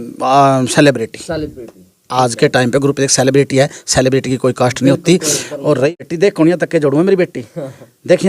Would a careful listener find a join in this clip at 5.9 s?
yes; 1 cut; at 5.9 s

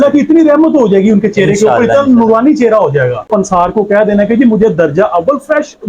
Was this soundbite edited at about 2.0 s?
no; 1 cut; at 3.3 s

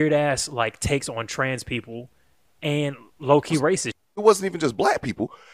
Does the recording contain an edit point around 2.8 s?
no; 1 cut; at 4.1 s

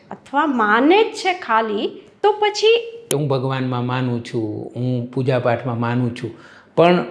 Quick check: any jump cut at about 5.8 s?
no; 1 cut; at 3.0 s

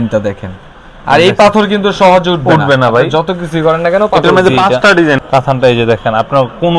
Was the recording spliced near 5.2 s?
yes; 1 cut; at 5.2 s

